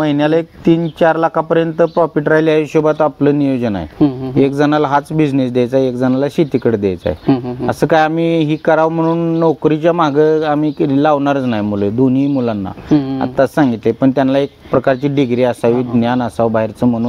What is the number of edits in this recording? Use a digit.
0